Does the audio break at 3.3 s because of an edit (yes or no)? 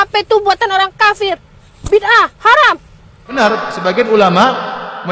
yes